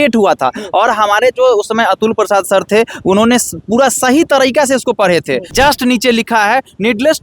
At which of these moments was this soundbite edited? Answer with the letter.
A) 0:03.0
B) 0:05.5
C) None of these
B